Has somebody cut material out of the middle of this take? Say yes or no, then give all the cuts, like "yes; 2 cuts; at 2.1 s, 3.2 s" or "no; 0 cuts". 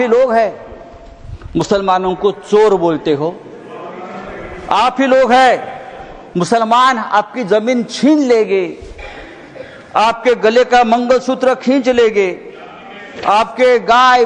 no; 0 cuts